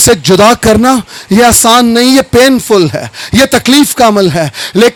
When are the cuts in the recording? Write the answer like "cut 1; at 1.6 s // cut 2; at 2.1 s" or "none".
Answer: none